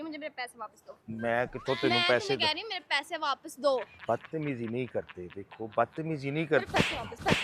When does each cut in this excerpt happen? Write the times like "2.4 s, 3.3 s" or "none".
none